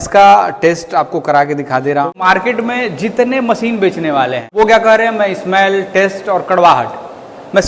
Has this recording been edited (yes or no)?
yes